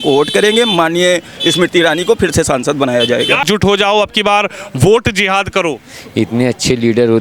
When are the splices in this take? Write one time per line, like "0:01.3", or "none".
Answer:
0:03.4